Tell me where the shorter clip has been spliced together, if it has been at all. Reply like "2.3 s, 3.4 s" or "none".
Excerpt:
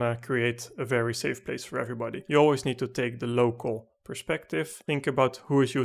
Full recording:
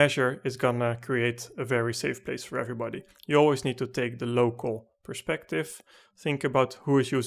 2.2 s, 4.8 s